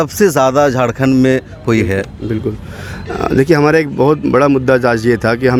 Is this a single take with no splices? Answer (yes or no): yes